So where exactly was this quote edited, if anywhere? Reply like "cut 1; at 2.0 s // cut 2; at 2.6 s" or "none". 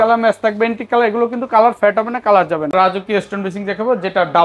cut 1; at 2.7 s

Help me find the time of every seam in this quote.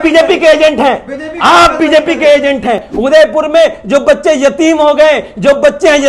cut 1; at 2.9 s

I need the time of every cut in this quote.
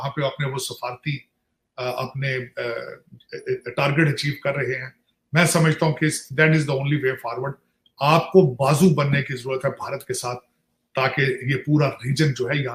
none

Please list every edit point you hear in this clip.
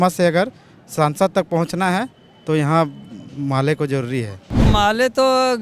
cut 1; at 4.7 s

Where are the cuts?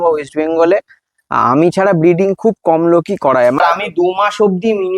cut 1; at 3.6 s

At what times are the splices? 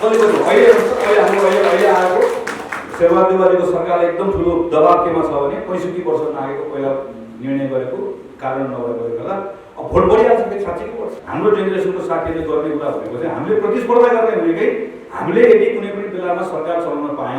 cut 1; at 11.2 s

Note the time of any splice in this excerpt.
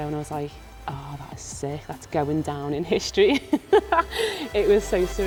none

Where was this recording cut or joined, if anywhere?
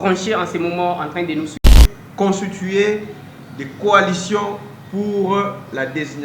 cut 1; at 1.6 s

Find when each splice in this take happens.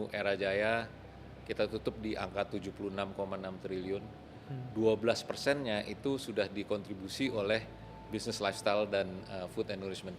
none

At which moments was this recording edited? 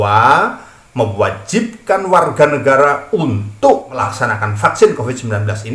cut 1; at 4.1 s

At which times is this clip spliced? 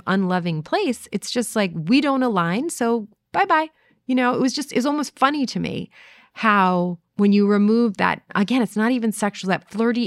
cut 1; at 7.0 s // cut 2; at 8.3 s

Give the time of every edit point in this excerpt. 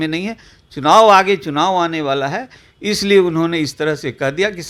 none

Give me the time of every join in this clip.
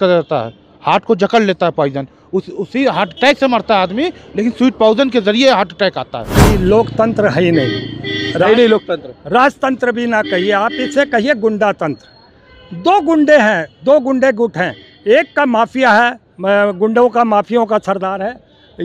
cut 1; at 6.3 s

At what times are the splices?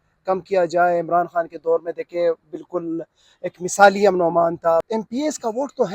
cut 1; at 4.9 s

